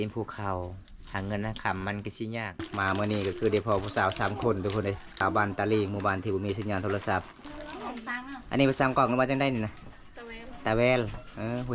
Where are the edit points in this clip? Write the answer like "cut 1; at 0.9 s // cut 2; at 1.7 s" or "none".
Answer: cut 1; at 2.6 s // cut 2; at 5.2 s // cut 3; at 7.4 s